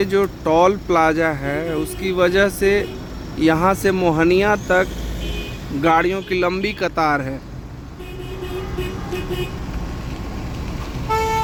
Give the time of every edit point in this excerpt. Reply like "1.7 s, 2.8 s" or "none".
none